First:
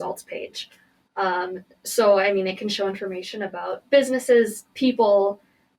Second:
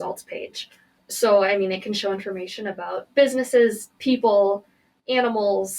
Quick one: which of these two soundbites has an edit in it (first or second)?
second